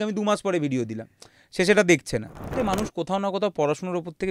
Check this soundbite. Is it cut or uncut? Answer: cut